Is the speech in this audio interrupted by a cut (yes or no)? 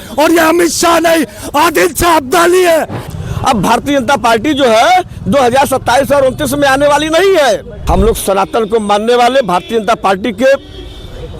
yes